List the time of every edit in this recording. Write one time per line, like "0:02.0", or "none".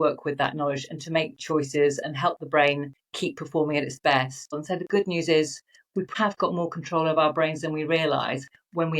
0:04.5
0:06.1